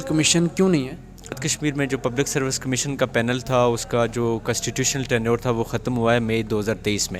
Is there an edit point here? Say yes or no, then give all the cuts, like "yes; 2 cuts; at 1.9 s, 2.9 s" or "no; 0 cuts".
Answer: yes; 1 cut; at 1.5 s